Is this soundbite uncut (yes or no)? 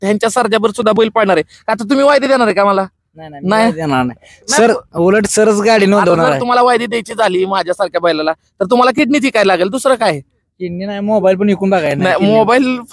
yes